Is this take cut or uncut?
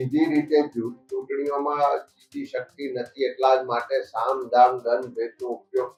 uncut